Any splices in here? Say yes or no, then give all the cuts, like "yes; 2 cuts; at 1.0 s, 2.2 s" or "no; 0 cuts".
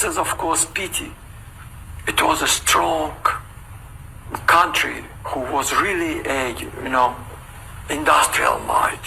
no; 0 cuts